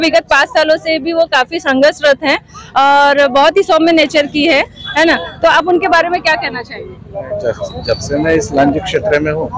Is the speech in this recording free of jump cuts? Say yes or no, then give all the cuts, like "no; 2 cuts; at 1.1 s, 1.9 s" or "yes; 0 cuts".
yes; 0 cuts